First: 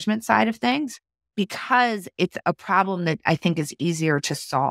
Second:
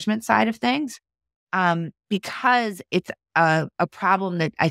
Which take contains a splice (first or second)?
first